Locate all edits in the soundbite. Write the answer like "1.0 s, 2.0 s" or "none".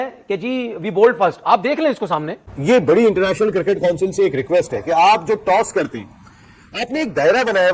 2.6 s